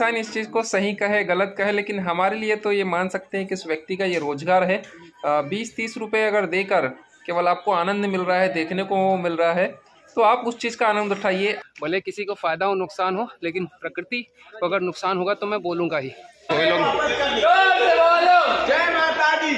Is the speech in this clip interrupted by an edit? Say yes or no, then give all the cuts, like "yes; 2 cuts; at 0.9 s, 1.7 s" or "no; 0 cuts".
yes; 2 cuts; at 11.6 s, 16.5 s